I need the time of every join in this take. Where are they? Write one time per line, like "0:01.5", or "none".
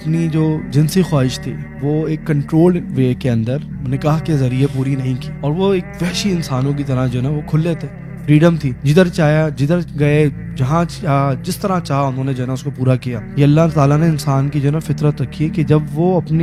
none